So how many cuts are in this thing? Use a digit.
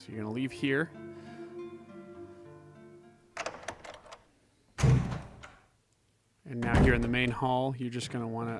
1